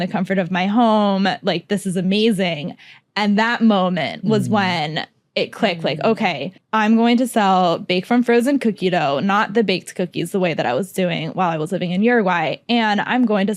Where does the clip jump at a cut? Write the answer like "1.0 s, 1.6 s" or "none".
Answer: none